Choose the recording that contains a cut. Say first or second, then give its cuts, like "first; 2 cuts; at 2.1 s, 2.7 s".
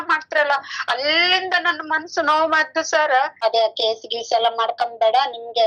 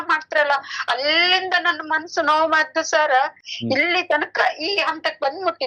first; 1 cut; at 3.3 s